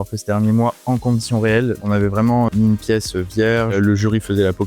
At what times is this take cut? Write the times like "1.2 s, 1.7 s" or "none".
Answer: 1.8 s